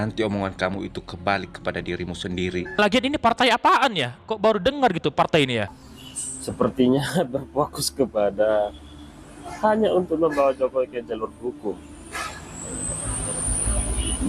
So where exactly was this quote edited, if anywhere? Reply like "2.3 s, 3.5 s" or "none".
2.8 s, 5.8 s